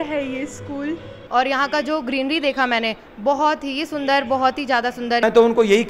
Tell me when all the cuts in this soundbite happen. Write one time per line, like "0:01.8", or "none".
0:01.1
0:05.2